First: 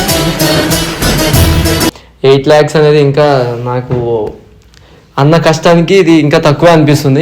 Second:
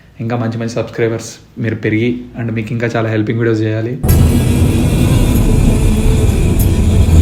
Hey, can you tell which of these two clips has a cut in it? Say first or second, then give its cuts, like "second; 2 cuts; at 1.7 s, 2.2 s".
first; 1 cut; at 2.1 s